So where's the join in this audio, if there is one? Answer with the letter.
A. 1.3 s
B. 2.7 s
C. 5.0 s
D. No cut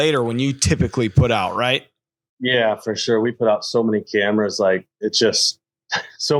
D